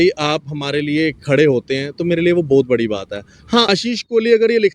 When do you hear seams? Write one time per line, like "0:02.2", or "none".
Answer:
0:03.7

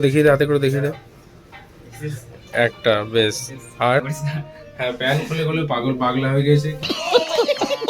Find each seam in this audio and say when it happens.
0:04.0

